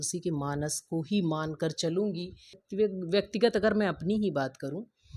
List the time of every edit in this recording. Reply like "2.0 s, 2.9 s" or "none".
2.6 s